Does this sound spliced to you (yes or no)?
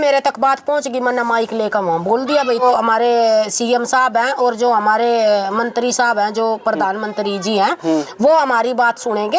yes